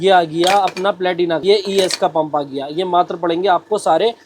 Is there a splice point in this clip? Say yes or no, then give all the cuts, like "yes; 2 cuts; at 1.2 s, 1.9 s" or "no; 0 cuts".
yes; 1 cut; at 1.4 s